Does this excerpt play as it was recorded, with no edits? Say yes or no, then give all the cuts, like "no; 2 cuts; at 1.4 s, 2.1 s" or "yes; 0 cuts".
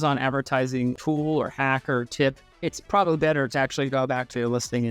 no; 2 cuts; at 1.0 s, 2.5 s